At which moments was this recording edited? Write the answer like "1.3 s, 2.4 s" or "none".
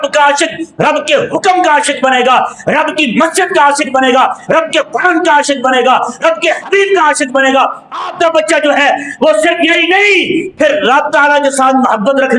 none